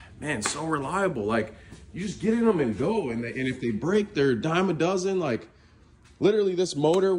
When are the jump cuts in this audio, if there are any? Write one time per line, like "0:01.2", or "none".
none